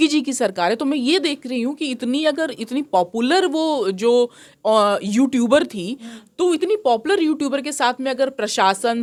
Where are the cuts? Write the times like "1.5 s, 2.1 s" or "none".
none